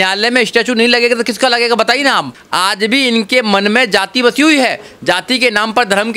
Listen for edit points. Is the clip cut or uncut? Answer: cut